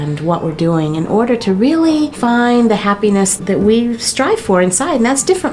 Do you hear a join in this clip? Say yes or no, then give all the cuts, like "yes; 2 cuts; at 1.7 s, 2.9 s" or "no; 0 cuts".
yes; 2 cuts; at 2.1 s, 3.4 s